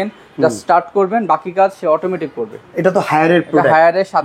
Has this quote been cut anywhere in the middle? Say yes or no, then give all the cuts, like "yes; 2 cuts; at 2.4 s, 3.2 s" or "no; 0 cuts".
no; 0 cuts